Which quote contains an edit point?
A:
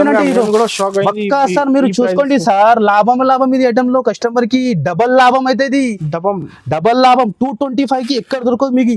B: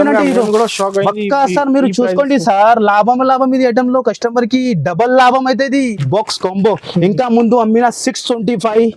B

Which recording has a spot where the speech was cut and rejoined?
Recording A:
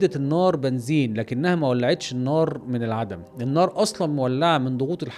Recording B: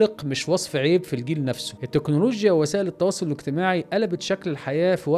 B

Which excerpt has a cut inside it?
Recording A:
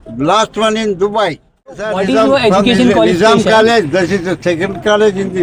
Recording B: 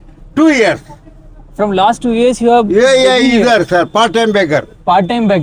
A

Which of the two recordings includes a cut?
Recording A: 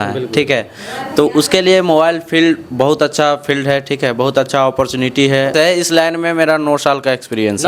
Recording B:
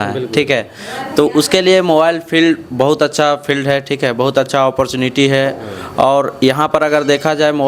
A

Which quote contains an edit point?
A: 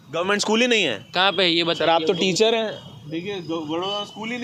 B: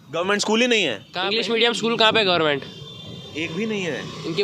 B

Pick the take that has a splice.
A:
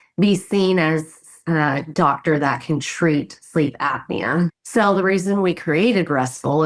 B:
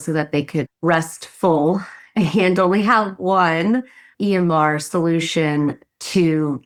A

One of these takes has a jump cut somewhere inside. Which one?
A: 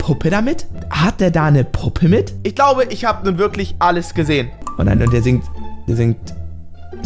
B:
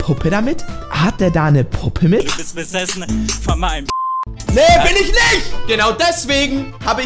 B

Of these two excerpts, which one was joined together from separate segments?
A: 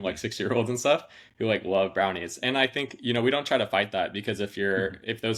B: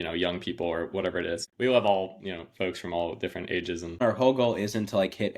B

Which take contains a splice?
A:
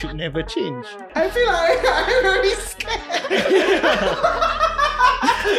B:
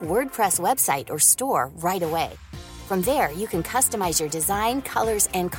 A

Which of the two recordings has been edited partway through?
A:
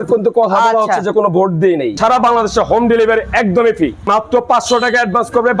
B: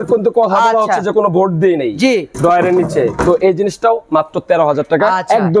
A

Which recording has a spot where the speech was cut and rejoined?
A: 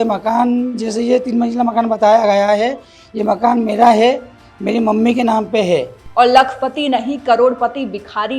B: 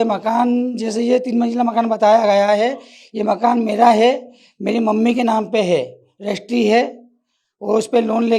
A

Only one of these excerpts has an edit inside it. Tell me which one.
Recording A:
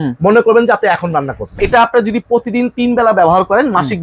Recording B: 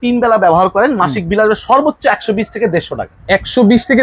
A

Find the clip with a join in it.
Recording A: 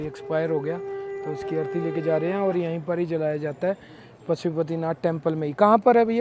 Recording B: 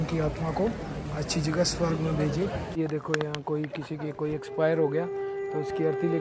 B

